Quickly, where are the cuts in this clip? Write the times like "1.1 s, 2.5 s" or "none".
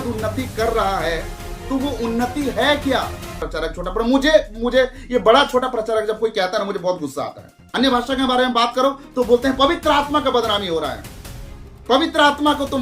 3.5 s, 7.7 s